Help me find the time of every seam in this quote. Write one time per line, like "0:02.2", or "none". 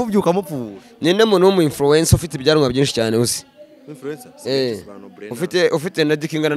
none